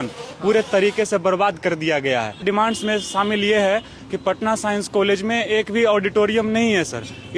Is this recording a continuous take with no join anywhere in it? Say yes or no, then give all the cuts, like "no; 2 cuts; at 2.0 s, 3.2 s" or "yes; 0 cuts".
no; 1 cut; at 2.4 s